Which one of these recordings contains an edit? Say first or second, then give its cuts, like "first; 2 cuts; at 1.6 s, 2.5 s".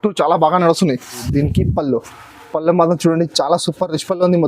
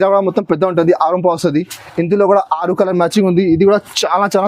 first; 1 cut; at 1.3 s